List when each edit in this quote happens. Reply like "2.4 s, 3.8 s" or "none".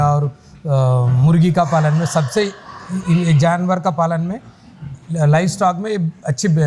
none